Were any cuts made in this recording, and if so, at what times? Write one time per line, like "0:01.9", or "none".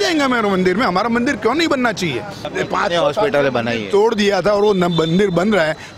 0:02.4

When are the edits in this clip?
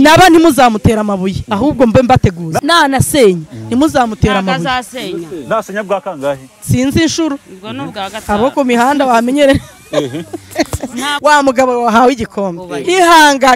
0:02.6
0:11.2

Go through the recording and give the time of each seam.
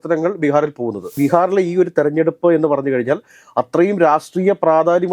0:01.1

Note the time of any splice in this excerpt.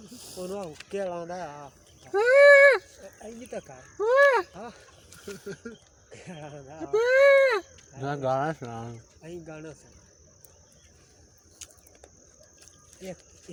none

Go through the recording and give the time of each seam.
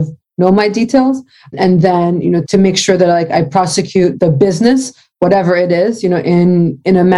0:01.5
0:02.4
0:04.1

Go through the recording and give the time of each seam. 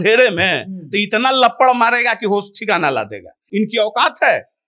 0:03.3

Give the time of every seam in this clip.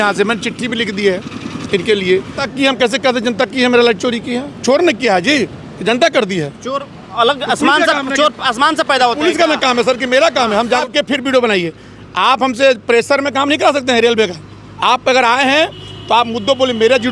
0:02.4
0:10.8

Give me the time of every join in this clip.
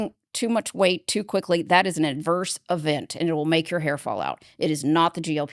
none

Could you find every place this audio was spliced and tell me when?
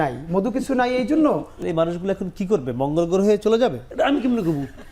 0:01.6
0:03.8

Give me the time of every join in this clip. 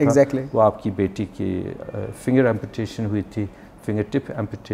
none

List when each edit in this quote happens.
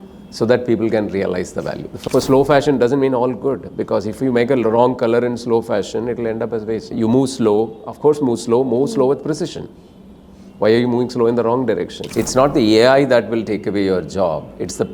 0:01.9
0:06.9
0:12.0

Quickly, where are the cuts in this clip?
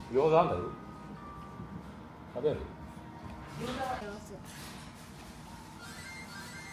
0:04.0

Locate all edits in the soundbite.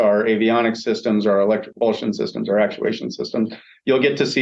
0:01.7

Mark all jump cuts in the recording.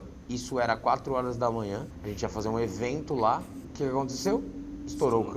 0:01.9
0:03.6

